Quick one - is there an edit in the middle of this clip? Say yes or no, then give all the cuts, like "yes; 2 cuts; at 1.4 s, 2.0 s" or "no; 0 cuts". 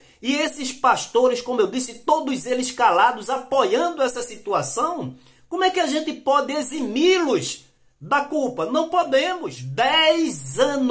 yes; 1 cut; at 9.5 s